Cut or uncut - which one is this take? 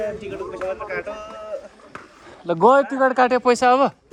uncut